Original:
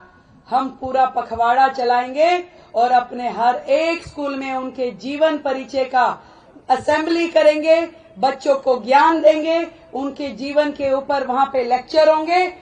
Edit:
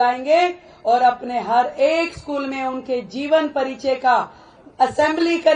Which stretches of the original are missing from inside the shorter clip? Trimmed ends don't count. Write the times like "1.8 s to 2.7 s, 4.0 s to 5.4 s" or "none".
none